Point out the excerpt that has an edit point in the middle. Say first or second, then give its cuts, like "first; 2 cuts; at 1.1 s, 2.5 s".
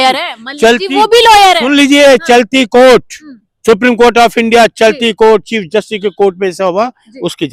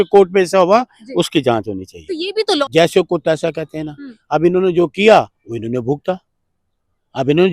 second; 1 cut; at 2.6 s